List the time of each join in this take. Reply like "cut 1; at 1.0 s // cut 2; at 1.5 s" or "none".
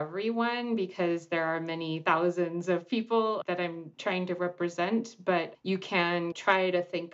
cut 1; at 3.5 s